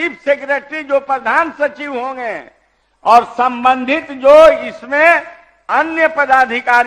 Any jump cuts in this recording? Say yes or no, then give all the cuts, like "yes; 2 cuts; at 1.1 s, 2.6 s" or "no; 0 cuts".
no; 0 cuts